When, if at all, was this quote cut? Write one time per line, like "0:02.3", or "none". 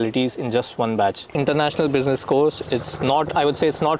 0:01.3